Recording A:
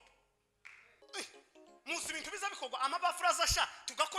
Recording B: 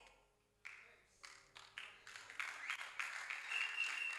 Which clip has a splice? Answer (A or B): A